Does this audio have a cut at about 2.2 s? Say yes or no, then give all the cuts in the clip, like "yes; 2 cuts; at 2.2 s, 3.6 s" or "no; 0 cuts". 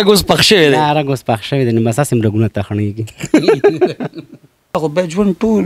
no; 1 cut; at 4.7 s